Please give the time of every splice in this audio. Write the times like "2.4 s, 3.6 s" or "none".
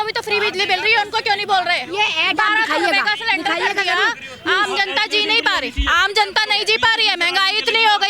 none